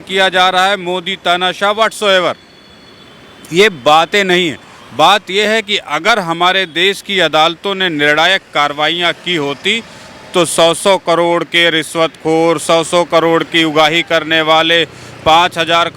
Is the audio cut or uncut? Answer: uncut